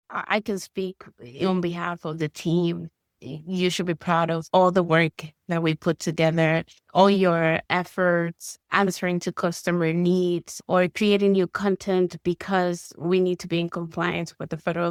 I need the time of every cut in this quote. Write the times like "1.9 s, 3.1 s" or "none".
none